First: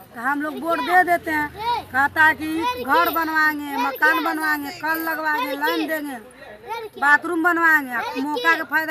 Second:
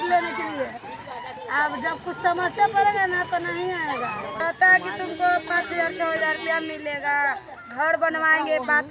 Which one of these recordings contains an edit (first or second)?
second